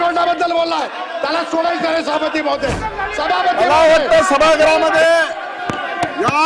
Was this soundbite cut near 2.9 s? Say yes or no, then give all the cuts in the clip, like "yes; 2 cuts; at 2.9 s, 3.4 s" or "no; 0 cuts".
yes; 1 cut; at 2.9 s